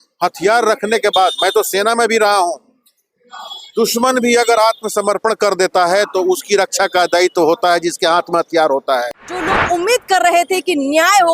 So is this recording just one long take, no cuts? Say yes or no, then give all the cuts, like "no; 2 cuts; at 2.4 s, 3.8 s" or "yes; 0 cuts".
no; 1 cut; at 9.5 s